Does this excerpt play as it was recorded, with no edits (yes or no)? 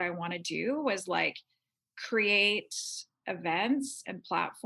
yes